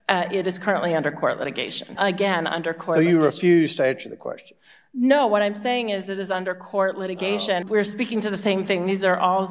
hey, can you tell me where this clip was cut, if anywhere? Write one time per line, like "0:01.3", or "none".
0:01.9
0:07.6